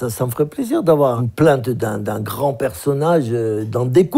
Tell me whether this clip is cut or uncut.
cut